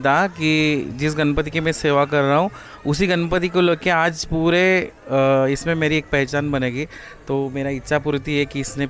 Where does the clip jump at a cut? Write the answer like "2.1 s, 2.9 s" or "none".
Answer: none